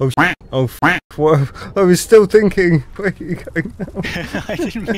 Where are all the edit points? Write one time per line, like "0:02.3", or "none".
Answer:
0:03.0